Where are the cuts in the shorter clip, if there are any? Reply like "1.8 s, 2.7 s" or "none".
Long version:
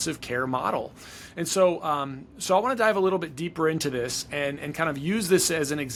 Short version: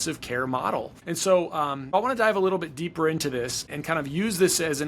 0.9 s, 1.9 s, 3.7 s